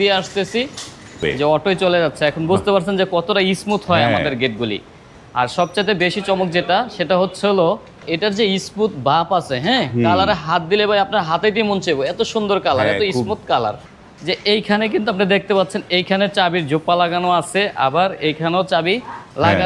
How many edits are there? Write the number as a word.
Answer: three